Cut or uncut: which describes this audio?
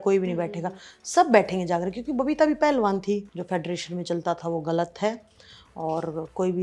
cut